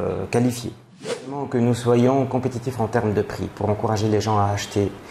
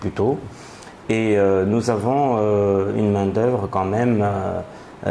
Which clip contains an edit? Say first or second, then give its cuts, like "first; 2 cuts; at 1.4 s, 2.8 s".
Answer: first; 1 cut; at 1.4 s